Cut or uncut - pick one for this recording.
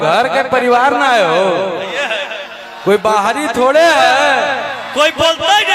uncut